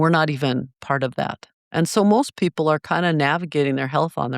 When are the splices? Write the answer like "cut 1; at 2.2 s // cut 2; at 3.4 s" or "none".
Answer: cut 1; at 1.6 s